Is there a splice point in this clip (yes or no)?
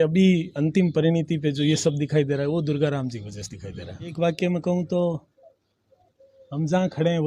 yes